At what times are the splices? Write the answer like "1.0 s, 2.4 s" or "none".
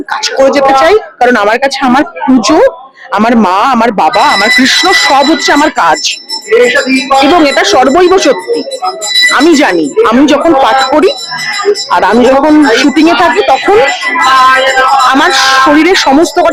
none